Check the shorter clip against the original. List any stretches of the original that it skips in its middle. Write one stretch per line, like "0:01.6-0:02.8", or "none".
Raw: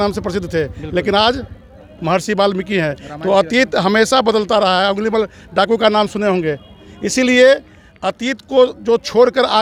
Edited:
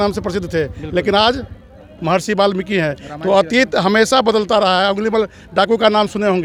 none